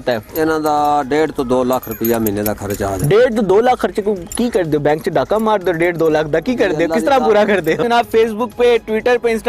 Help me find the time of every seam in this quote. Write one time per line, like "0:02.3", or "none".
0:07.8